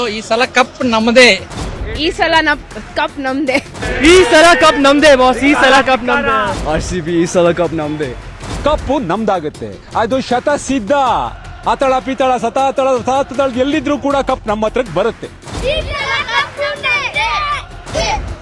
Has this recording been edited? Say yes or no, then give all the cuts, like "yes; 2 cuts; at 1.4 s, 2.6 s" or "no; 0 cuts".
no; 0 cuts